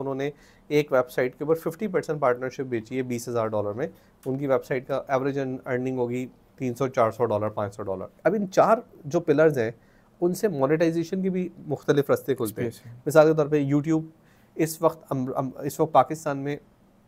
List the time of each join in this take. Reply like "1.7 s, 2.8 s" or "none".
8.0 s